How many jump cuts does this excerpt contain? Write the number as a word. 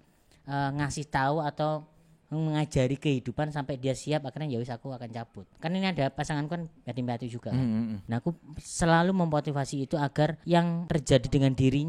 three